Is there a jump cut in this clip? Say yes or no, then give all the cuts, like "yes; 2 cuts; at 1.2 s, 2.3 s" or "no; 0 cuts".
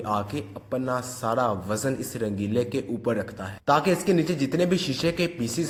no; 0 cuts